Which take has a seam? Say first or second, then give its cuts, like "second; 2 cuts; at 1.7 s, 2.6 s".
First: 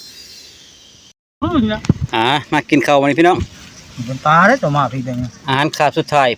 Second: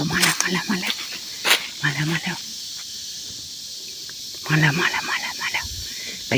first; 1 cut; at 1.1 s